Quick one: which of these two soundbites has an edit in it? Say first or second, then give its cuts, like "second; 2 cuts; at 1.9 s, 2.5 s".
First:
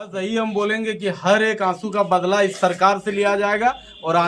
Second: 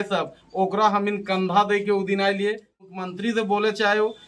second; 1 cut; at 2.9 s